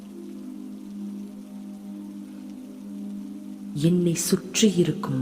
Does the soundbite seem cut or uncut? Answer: cut